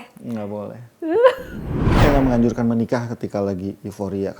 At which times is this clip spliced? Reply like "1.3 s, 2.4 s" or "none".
1.9 s